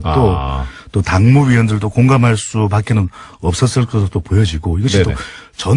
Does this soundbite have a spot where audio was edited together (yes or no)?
yes